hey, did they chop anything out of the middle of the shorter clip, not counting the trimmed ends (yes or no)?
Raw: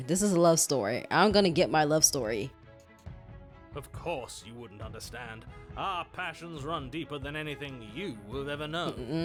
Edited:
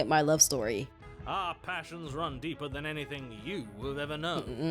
yes